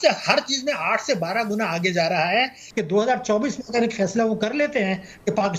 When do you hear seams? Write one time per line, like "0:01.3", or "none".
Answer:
0:02.7

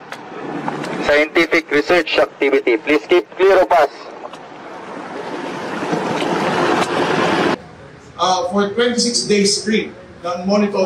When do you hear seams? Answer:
0:07.5

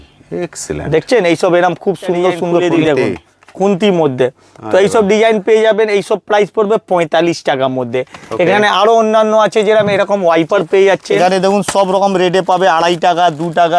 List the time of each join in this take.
0:02.6
0:11.1

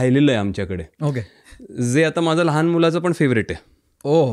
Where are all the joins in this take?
none

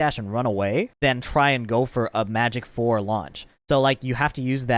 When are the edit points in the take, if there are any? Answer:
0:00.9

